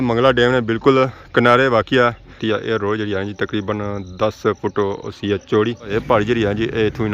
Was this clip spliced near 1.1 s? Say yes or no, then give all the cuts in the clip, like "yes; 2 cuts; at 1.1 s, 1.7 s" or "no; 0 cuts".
no; 2 cuts; at 2.3 s, 5.9 s